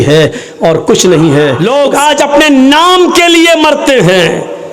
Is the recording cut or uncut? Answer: cut